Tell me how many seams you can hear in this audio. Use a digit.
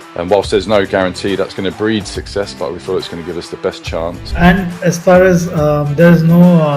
1